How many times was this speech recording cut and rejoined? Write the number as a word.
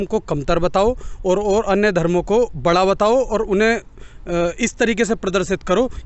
zero